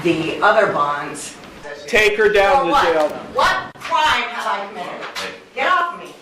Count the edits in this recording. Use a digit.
1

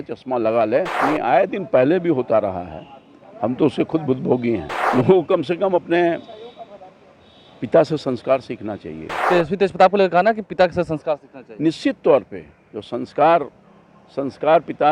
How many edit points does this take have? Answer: 3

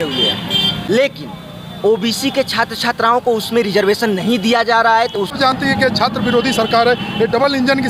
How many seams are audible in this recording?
2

